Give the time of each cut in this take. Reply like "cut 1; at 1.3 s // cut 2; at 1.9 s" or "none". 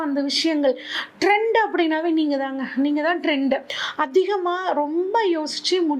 cut 1; at 3.8 s